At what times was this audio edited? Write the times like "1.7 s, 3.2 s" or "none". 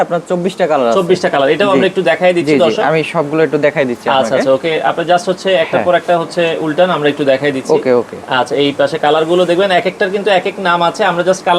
none